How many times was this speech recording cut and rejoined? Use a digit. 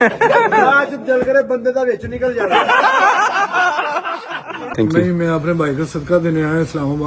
2